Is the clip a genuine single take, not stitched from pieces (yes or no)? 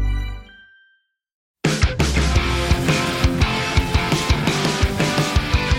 no